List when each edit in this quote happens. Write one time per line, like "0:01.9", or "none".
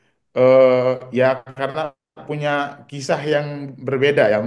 none